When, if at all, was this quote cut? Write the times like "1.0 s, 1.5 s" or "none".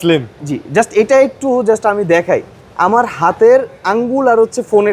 none